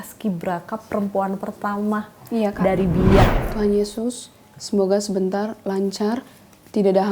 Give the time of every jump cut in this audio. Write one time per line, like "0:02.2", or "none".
0:03.3